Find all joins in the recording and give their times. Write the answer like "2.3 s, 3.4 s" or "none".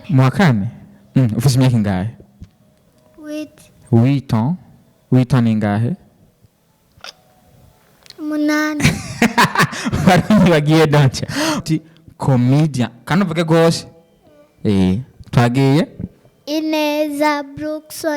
11.6 s